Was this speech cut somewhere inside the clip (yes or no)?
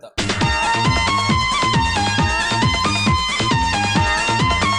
no